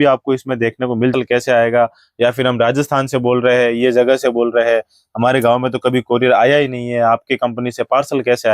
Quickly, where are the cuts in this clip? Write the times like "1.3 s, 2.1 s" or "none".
1.1 s